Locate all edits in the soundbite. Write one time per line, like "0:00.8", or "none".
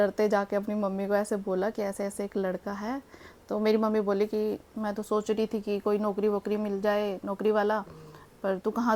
none